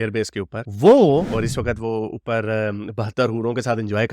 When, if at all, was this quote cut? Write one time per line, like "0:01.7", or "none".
0:01.3